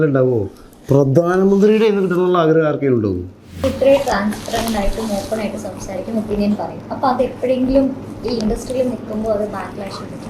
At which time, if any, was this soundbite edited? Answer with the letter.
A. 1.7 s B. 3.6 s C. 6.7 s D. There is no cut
B